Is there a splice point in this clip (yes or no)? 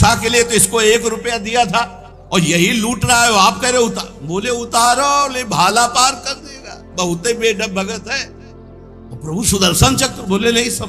no